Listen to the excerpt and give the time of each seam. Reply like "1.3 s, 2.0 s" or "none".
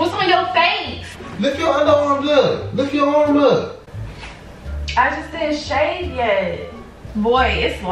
0.9 s, 7.0 s